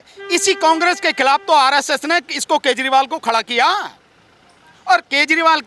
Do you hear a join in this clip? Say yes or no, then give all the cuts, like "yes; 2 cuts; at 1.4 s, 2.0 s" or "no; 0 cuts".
no; 0 cuts